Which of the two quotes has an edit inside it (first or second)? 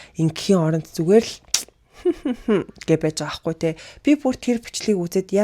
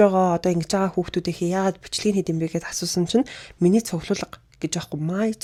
first